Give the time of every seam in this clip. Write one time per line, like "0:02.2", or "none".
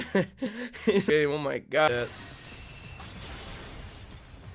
0:01.1